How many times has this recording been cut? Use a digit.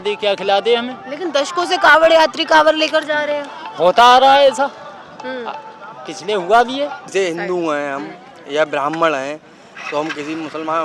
1